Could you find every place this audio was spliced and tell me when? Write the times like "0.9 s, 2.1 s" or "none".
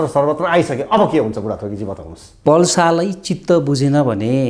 2.3 s